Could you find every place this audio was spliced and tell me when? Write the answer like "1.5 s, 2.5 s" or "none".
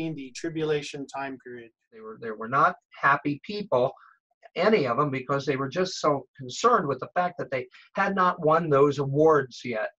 2.0 s